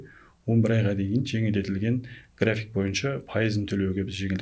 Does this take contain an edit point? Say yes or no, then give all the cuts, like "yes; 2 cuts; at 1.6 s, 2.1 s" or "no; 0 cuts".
no; 0 cuts